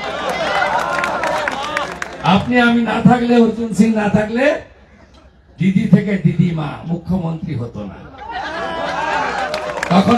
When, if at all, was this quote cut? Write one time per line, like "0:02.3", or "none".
none

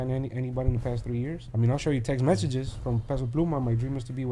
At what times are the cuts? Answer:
0:01.4

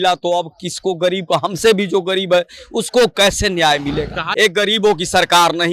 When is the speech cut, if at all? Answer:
0:04.2

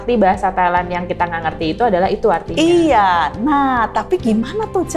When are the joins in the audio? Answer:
none

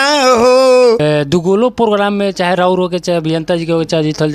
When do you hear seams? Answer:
0:01.0

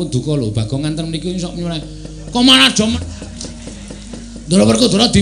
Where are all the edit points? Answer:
0:02.9

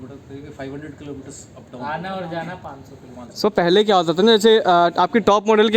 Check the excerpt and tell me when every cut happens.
0:03.3

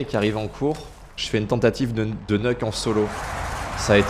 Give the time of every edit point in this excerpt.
none

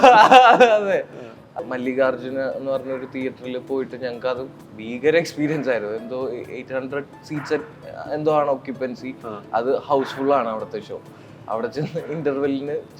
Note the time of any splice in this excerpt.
0:01.6

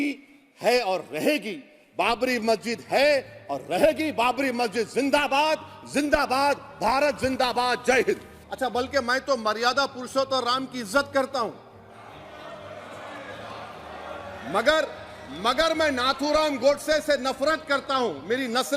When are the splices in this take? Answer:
0:08.4

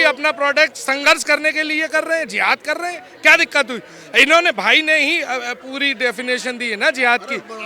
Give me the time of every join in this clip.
none

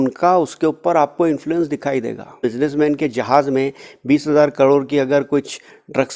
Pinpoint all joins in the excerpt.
0:02.4

